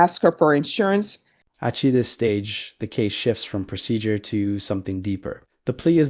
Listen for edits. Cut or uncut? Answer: uncut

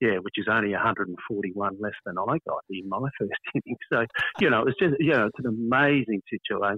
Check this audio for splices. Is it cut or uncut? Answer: uncut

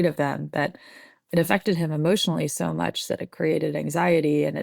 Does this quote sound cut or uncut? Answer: uncut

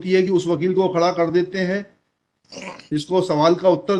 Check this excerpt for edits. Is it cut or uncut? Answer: uncut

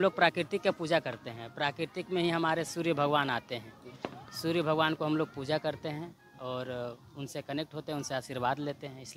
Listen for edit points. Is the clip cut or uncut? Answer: uncut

